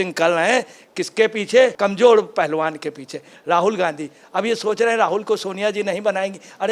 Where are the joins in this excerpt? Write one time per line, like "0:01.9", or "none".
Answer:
none